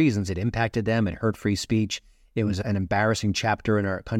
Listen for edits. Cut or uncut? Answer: uncut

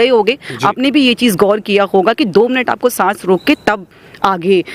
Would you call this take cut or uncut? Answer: uncut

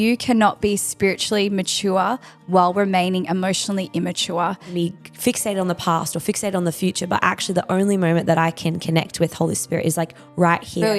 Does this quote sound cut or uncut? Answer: cut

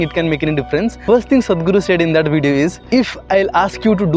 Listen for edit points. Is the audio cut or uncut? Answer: cut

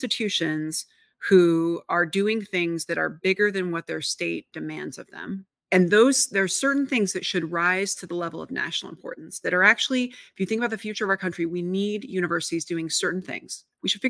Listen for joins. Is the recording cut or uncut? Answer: uncut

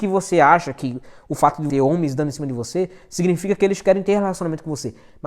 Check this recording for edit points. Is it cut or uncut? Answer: cut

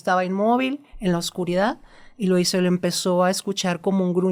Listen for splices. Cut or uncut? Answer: uncut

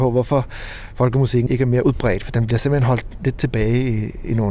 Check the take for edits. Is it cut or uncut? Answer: cut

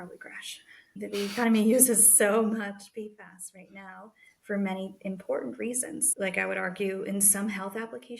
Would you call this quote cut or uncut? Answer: cut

